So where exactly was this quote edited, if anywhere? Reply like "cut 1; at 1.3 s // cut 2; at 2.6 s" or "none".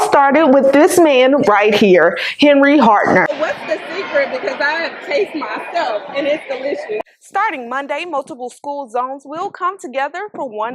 cut 1; at 3.3 s // cut 2; at 7.0 s